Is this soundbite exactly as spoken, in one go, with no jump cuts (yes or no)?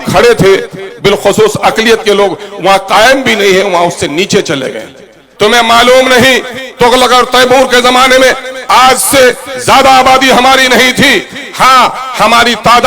no